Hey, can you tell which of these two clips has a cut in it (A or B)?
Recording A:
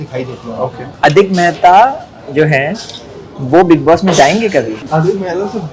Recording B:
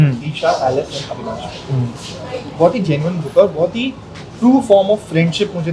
A